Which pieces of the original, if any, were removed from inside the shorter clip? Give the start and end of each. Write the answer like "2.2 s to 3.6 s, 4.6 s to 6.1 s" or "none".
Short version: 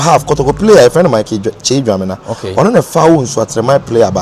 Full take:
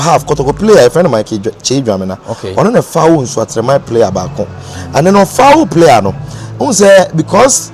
none

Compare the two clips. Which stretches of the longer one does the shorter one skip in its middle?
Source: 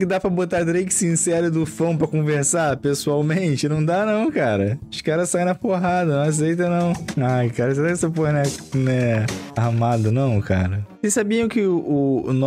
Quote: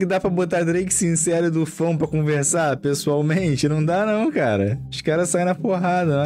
none

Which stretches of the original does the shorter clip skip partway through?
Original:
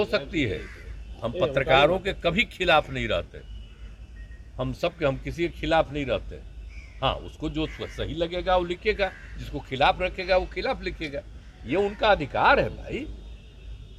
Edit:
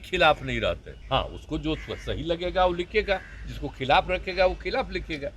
3.4 s to 6.8 s

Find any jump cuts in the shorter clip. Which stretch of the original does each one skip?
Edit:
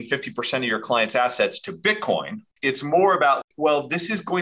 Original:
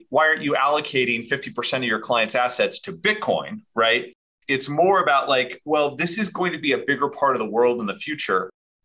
3.6 s to 4.2 s, 5.3 s to 5.5 s

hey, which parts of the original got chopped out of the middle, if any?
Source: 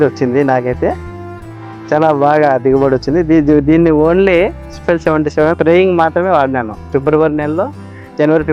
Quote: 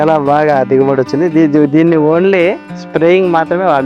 4.8 s to 5.5 s

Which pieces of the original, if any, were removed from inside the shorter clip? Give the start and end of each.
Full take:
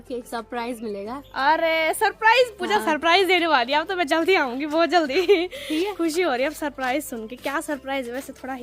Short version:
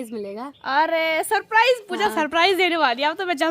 none

